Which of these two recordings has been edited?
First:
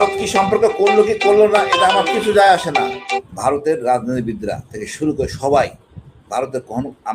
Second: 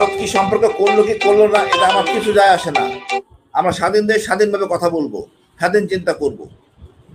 first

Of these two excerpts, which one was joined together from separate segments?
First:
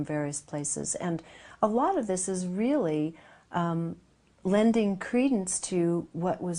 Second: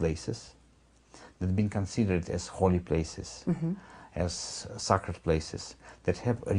first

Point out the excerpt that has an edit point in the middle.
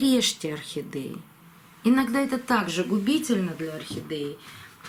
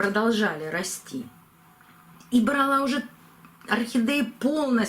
second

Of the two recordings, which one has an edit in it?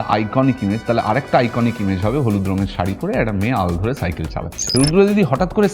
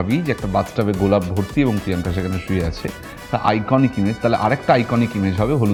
first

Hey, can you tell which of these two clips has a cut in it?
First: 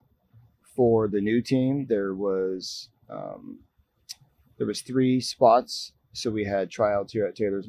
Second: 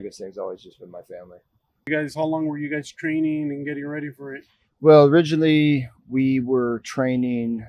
second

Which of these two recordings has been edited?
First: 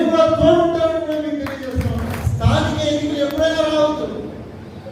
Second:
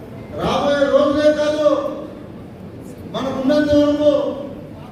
first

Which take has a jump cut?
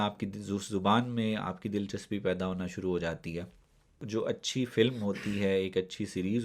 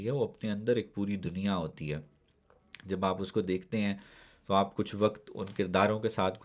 first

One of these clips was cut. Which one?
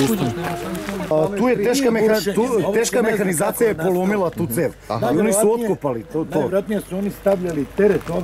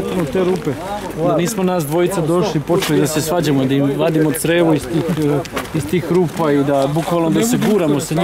first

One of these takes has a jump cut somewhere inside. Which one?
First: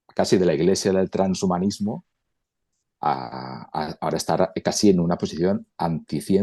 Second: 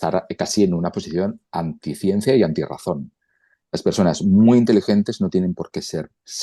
second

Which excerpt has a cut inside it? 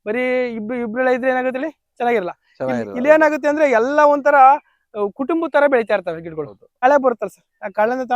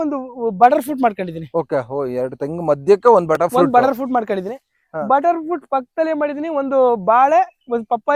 first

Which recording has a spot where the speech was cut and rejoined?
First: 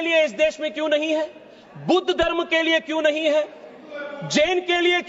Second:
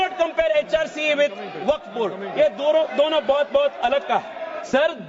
second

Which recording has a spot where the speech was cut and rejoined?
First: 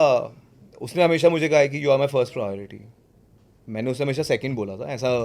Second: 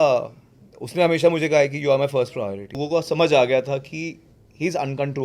second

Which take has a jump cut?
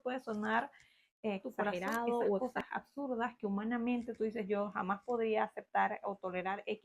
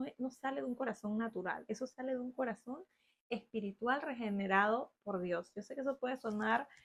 first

